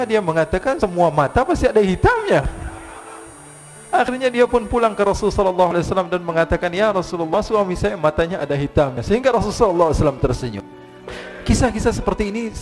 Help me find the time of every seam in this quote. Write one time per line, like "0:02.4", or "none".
0:11.0